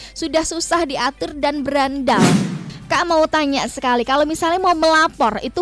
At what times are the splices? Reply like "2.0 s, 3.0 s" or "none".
2.6 s